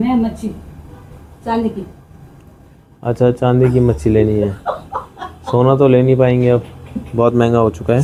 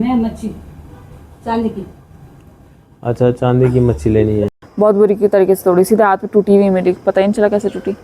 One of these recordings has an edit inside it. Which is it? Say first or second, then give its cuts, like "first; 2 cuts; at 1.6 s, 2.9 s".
second; 1 cut; at 4.6 s